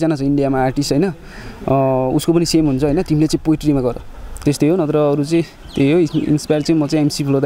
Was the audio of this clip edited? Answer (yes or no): yes